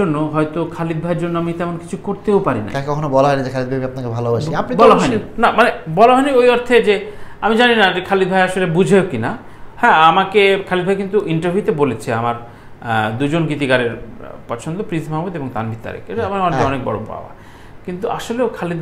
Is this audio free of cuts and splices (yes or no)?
yes